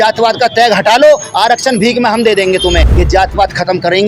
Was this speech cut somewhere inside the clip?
yes; 1 cut; at 2.9 s

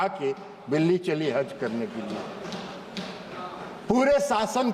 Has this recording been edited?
no; 0 cuts

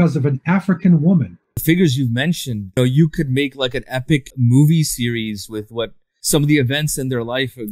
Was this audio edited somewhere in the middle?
yes; 4 cuts; at 1.6 s, 2.8 s, 4.3 s, 6.1 s

